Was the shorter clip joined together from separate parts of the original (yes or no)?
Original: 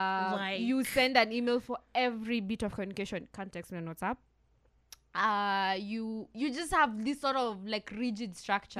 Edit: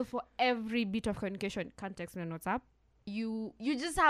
yes